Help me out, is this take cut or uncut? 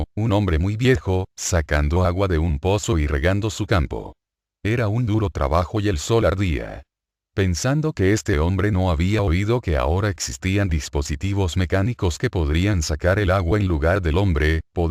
uncut